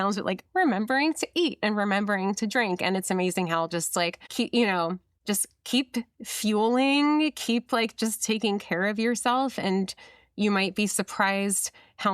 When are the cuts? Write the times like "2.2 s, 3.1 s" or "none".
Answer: 4.2 s, 5.1 s

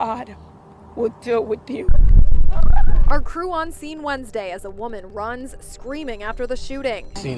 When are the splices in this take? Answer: 1.9 s

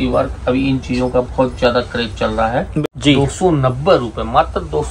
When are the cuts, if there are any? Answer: 2.7 s

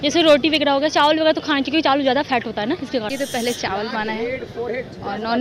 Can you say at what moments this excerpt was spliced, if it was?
3.1 s

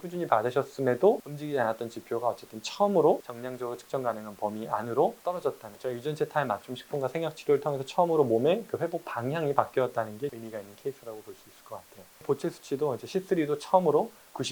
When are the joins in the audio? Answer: none

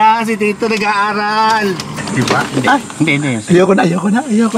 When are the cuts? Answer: 1.9 s

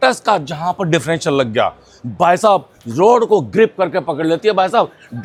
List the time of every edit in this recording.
none

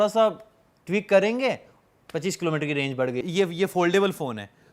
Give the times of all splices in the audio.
3.2 s

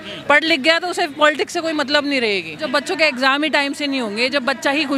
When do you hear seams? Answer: 2.6 s

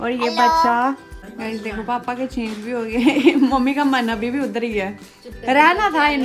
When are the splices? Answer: 1.3 s

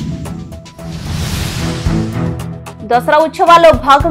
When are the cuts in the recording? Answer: 2.7 s

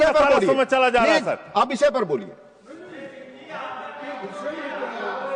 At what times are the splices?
none

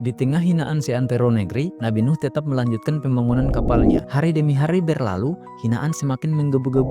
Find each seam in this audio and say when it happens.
1.7 s, 4.1 s

